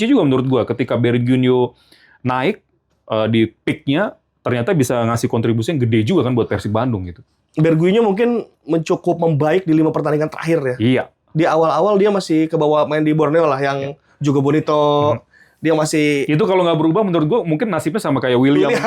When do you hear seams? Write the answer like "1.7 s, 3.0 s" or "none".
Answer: none